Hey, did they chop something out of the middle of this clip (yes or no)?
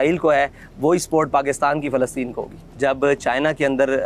yes